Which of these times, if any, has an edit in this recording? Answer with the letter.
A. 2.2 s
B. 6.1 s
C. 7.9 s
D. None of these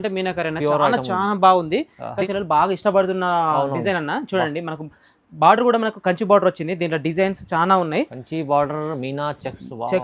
A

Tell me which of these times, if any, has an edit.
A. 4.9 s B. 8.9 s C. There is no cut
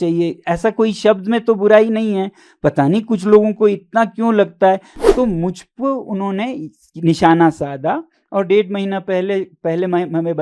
A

